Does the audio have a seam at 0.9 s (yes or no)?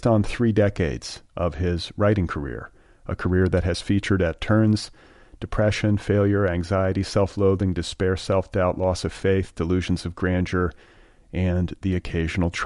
no